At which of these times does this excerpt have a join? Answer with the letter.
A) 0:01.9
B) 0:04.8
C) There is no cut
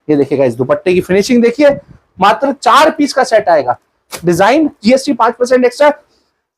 B